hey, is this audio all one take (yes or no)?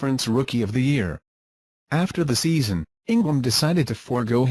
no